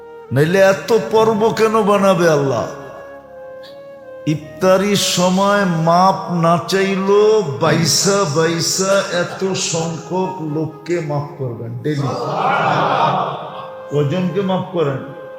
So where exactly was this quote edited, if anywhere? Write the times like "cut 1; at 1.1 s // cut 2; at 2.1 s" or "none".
none

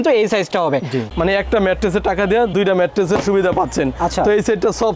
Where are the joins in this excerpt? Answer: cut 1; at 1.1 s

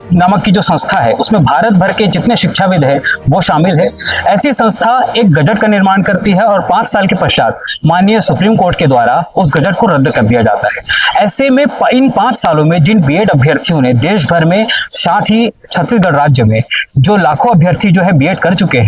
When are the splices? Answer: none

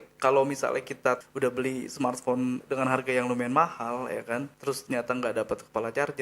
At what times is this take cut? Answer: cut 1; at 1.2 s // cut 2; at 2.6 s // cut 3; at 4.5 s

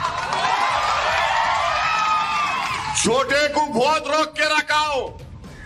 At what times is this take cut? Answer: cut 1; at 4.3 s

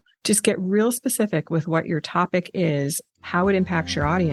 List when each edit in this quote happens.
none

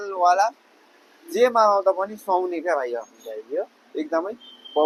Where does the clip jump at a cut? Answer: none

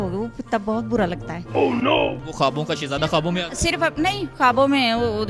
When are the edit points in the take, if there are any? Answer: cut 1; at 2.2 s

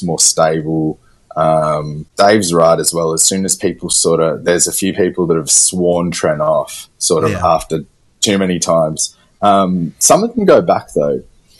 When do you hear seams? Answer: cut 1; at 2.0 s

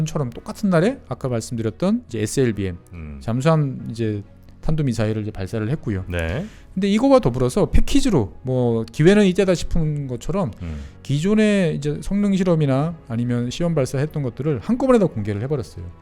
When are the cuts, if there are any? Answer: cut 1; at 2.1 s

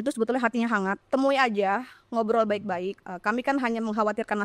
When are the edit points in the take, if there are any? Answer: cut 1; at 1.0 s // cut 2; at 3.0 s

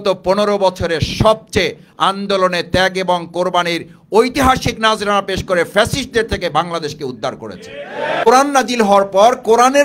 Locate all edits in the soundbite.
cut 1; at 8.3 s

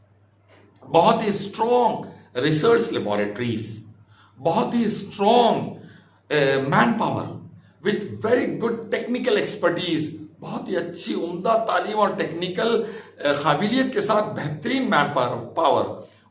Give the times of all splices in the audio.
none

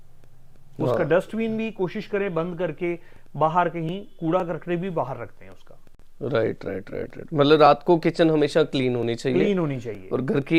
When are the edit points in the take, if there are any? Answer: none

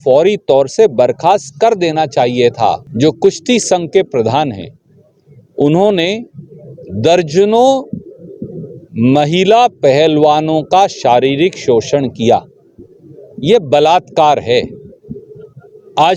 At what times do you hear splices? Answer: cut 1; at 2.9 s

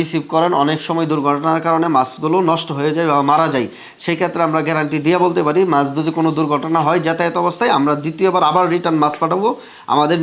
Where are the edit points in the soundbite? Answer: none

